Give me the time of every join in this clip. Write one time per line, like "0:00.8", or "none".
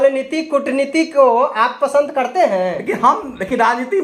none